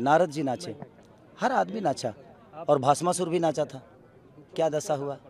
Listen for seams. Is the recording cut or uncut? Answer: uncut